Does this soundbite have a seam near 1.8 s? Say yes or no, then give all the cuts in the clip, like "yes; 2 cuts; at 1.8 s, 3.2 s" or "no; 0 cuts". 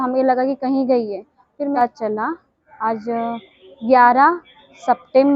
yes; 1 cut; at 1.8 s